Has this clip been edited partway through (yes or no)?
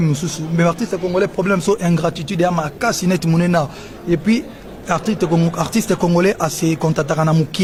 no